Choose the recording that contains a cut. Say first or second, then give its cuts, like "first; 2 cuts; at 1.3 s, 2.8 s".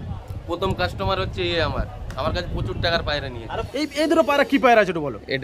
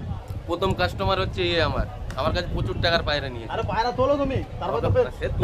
first; 1 cut; at 3.6 s